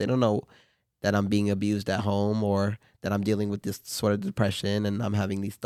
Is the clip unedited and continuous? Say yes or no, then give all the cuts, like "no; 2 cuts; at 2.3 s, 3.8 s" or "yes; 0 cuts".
yes; 0 cuts